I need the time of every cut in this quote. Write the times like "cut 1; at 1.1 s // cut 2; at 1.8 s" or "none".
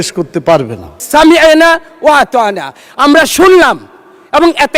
cut 1; at 0.9 s